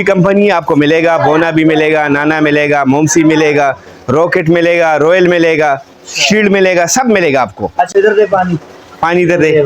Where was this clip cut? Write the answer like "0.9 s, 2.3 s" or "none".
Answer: 7.9 s